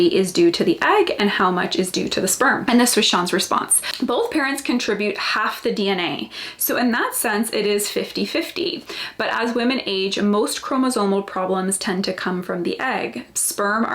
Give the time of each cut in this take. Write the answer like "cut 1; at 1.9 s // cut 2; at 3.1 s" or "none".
cut 1; at 2.6 s // cut 2; at 3.8 s